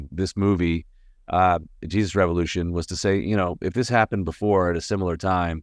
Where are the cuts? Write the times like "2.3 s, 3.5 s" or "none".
none